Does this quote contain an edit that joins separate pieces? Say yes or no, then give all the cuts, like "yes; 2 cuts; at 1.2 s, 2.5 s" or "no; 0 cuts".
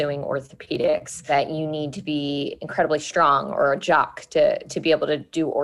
yes; 1 cut; at 1.1 s